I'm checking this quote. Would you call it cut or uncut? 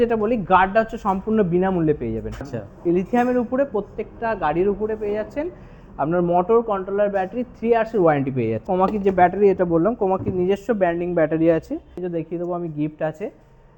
cut